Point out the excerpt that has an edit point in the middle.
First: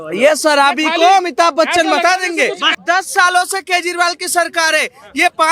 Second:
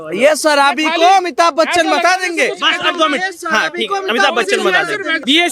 first; 1 cut; at 2.7 s

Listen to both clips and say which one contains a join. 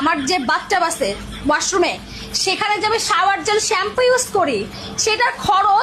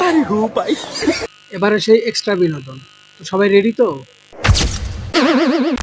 second; 1 cut; at 1.3 s

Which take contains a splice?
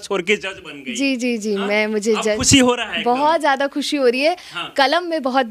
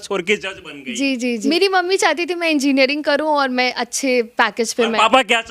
second; 1 cut; at 1.4 s

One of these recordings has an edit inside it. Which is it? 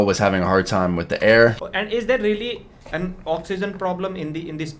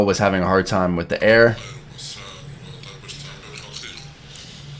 first; 1 cut; at 1.6 s

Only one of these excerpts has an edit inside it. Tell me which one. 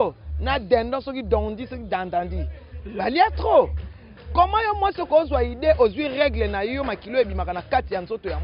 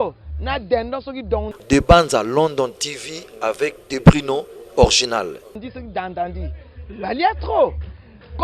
second; 2 cuts; at 1.6 s, 5.5 s

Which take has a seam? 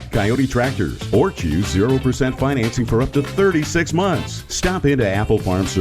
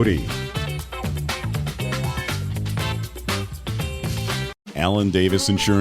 second; 1 cut; at 4.6 s

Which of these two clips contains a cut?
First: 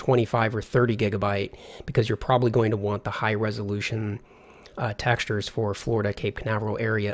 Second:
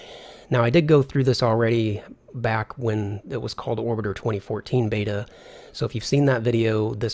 first; 1 cut; at 3.2 s

